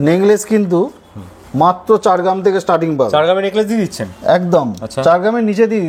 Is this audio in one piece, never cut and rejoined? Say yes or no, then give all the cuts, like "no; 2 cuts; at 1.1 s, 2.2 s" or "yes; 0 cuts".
yes; 0 cuts